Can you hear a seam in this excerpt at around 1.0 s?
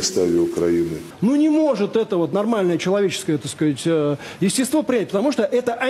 yes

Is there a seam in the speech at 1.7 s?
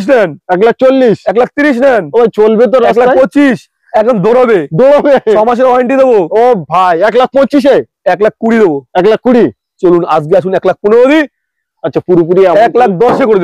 no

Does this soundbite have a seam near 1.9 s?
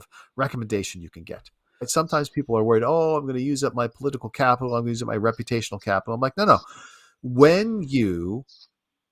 yes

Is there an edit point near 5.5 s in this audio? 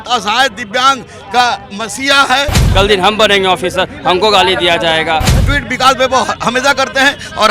yes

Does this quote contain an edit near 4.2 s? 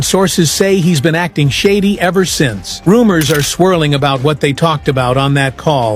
no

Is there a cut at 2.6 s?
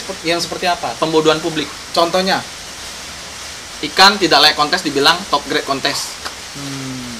no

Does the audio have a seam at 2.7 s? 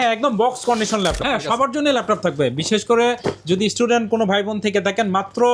no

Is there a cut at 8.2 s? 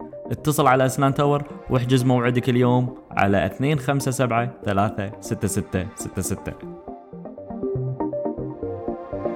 no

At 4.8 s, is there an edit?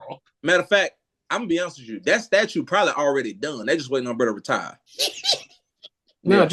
no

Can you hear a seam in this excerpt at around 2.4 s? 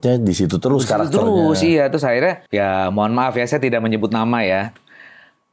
yes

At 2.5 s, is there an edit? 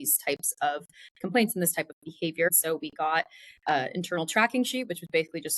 yes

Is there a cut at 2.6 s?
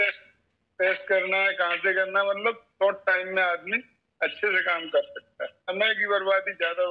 no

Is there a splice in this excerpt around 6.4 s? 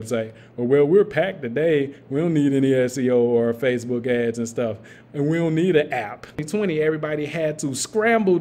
yes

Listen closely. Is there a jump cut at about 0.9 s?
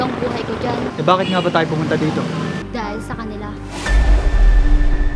yes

